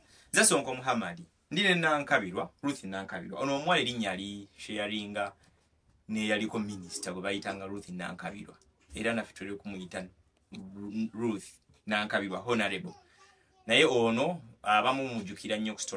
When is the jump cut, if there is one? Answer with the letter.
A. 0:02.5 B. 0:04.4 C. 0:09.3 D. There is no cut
D